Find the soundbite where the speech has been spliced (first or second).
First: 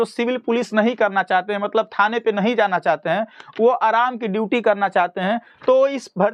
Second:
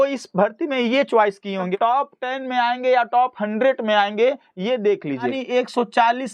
second